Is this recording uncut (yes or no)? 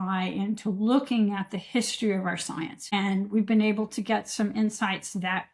no